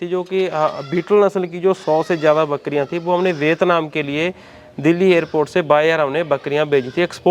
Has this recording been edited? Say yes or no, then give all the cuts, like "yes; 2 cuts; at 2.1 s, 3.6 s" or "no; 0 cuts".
no; 0 cuts